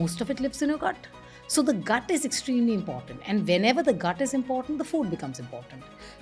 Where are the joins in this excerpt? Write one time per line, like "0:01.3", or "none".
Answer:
none